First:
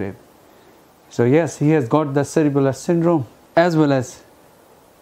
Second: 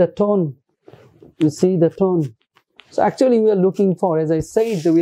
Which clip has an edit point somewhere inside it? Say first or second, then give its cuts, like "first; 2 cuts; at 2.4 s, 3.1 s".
first; 1 cut; at 3.4 s